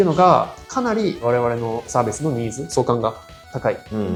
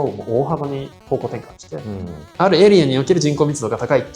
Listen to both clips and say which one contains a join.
second; 1 cut; at 2.3 s

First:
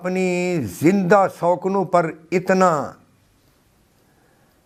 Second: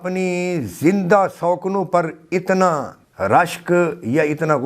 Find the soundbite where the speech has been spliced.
second; 1 cut; at 3.0 s

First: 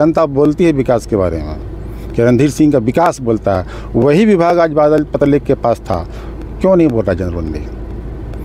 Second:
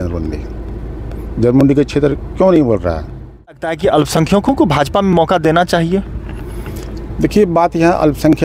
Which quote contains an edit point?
second; 1 cut; at 3.7 s

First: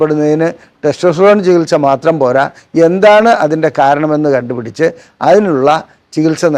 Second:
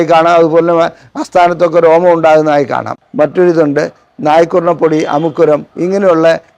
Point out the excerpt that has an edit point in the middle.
second; 1 cut; at 3.0 s

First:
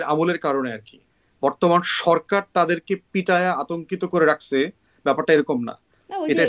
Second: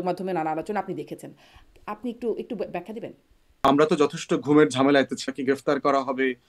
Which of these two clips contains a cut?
second; 2 cuts; at 3.5 s, 5.3 s

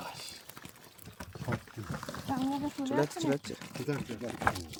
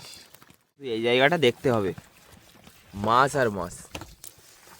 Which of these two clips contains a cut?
second; 1 cut; at 0.9 s

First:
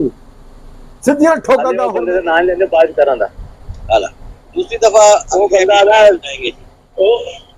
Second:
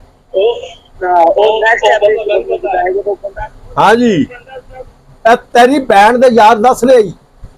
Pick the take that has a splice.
first; 1 cut; at 1.8 s

